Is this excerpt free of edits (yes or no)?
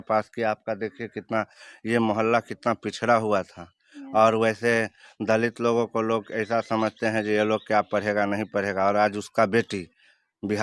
yes